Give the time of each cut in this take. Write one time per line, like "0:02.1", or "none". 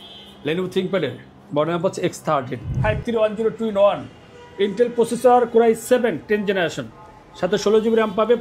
0:02.7